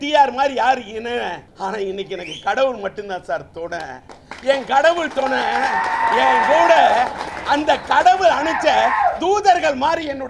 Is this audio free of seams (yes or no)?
no